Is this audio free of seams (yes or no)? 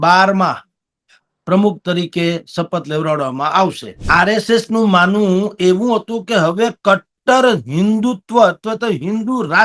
no